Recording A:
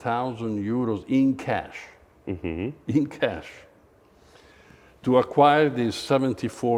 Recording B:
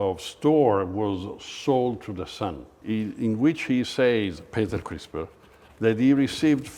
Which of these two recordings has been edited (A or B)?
B